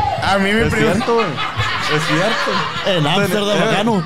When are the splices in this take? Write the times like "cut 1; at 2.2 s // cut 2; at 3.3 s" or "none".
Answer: none